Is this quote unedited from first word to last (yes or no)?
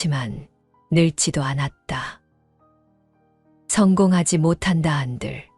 no